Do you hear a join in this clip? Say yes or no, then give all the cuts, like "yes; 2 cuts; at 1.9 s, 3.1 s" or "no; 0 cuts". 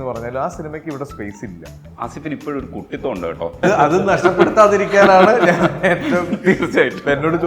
yes; 2 cuts; at 1.8 s, 3.6 s